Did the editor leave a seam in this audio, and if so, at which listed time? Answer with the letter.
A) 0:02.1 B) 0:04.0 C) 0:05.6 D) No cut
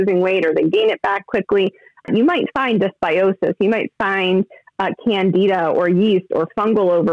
A